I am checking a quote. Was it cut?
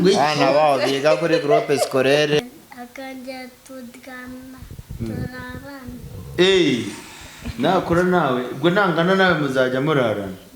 yes; 1 cut; at 2.4 s

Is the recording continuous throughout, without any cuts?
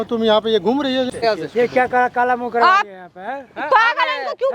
no; 1 cut; at 1.2 s

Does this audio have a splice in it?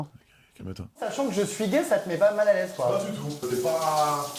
yes; 2 cuts; at 1.1 s, 3.4 s

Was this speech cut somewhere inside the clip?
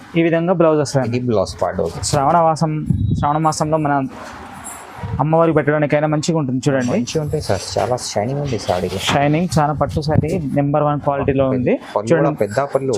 yes; 1 cut; at 1.9 s

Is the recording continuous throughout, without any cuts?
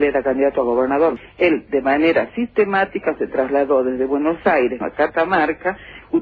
no; 1 cut; at 1.2 s

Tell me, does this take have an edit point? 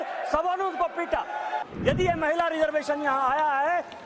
yes; 1 cut; at 1.6 s

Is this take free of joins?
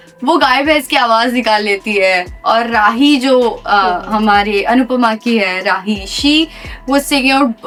yes; 0 cuts

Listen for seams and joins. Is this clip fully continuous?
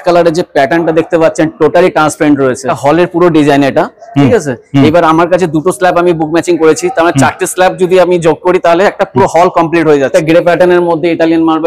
no; 2 cuts; at 2.7 s, 10.1 s

